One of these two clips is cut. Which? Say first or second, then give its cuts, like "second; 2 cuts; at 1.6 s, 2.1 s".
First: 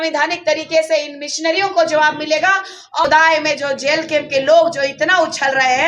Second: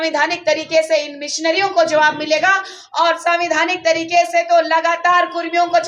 first; 1 cut; at 3.0 s